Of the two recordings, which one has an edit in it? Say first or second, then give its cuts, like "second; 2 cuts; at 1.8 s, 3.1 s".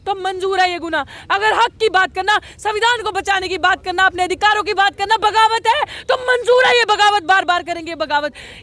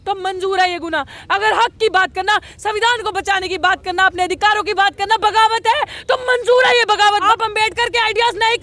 second; 1 cut; at 7.2 s